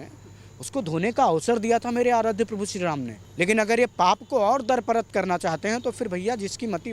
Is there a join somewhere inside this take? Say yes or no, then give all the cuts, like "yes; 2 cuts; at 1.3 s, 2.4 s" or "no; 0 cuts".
yes; 1 cut; at 3.2 s